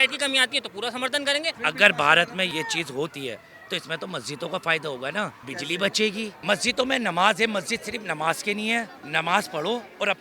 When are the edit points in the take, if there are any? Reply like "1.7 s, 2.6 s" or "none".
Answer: 1.6 s, 2.5 s, 5.5 s, 6.3 s, 9.0 s